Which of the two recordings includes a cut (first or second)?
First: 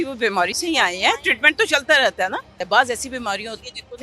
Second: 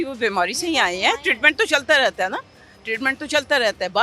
first